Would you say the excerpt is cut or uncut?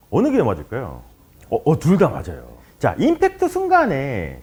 uncut